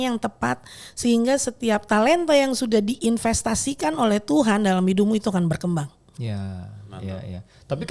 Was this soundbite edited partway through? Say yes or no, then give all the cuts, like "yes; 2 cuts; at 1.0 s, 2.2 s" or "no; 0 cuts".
no; 0 cuts